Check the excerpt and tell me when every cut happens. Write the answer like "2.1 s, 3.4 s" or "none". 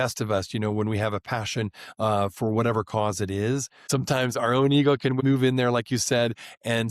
5.2 s